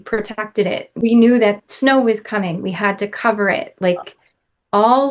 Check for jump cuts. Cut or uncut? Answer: uncut